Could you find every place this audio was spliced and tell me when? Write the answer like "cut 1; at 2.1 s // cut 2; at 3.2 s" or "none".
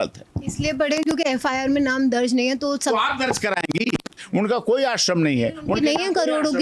cut 1; at 4.2 s